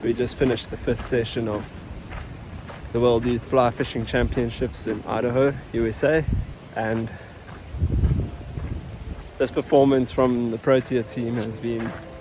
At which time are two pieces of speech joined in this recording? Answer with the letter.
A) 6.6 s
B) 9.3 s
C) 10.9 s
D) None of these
A